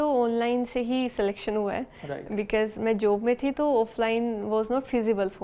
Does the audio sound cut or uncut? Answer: uncut